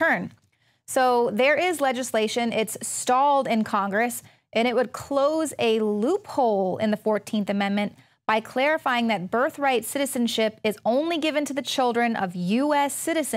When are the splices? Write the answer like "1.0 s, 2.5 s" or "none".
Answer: 3.4 s